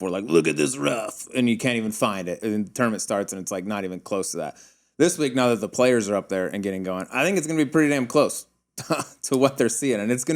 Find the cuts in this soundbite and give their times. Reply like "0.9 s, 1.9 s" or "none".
2.4 s

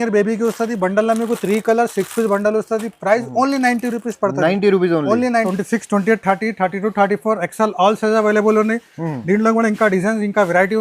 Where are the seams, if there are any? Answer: 5.5 s

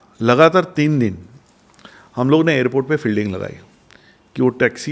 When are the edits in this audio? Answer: none

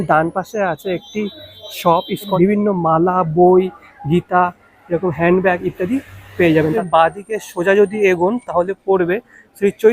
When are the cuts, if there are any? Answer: 2.3 s, 6.8 s

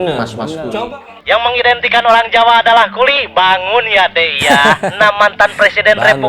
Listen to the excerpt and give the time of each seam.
1.1 s

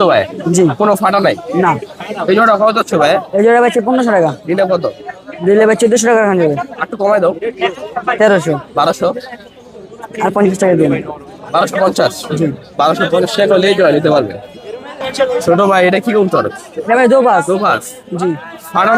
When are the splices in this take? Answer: none

